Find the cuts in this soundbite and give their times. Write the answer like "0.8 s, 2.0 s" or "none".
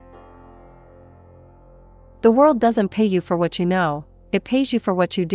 1.5 s